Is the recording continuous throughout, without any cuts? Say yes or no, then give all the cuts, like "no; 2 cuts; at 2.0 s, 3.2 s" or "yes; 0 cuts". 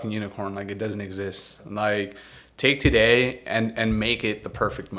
yes; 0 cuts